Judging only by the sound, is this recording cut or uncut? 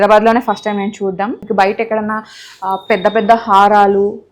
cut